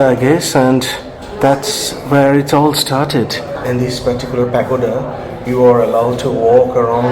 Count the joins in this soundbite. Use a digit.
1